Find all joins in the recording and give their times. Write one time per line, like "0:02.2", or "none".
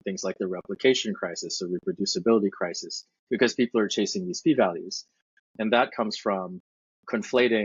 0:05.3

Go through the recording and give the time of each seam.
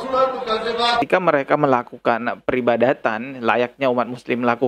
0:01.1

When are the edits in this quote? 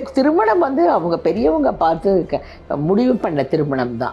none

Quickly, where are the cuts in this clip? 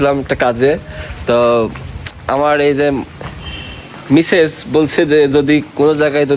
none

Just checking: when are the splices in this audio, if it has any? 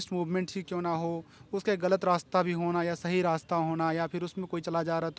none

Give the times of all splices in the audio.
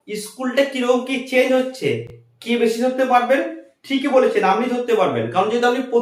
none

